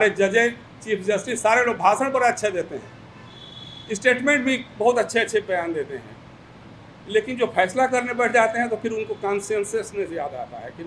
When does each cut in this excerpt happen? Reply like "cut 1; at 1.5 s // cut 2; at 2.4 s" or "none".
none